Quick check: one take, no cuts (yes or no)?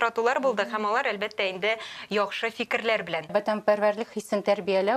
no